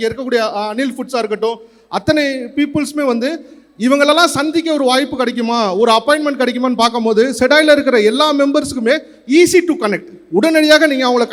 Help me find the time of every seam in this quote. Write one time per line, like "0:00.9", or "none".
none